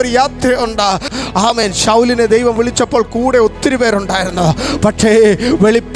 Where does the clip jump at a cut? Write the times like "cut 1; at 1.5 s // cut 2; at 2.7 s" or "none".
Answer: cut 1; at 1.1 s